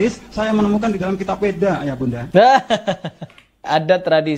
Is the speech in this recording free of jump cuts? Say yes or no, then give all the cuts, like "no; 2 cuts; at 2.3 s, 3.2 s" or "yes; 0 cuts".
no; 2 cuts; at 2.2 s, 3.6 s